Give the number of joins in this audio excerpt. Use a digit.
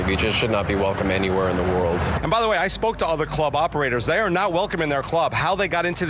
0